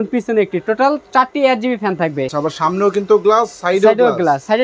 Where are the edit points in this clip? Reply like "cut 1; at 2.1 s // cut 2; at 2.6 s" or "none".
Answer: cut 1; at 2.3 s